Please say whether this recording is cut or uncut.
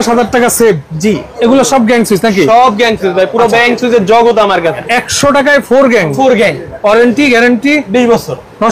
cut